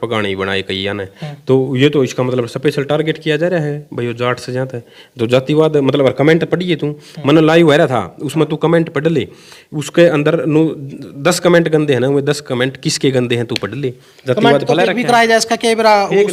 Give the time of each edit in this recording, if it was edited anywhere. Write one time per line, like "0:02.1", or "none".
none